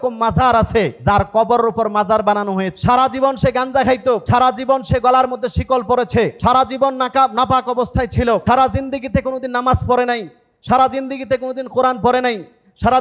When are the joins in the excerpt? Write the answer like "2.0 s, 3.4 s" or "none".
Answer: 1.0 s, 2.7 s, 4.2 s, 6.4 s, 8.4 s